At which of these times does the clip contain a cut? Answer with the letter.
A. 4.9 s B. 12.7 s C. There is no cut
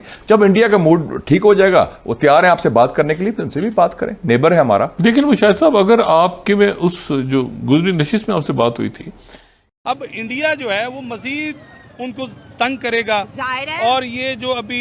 C